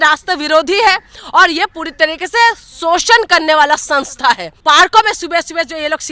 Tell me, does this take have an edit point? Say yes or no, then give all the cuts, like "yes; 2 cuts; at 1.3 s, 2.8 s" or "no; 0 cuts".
yes; 1 cut; at 4.5 s